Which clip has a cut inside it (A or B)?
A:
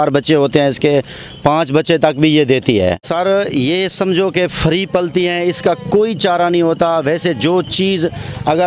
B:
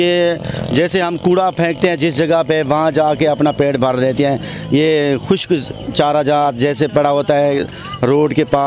A